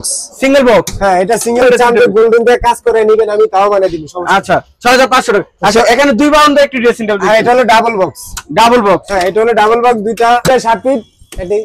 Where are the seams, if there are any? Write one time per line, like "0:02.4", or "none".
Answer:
0:01.6
0:10.5